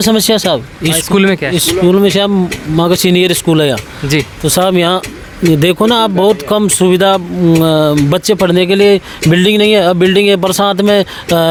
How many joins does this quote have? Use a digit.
0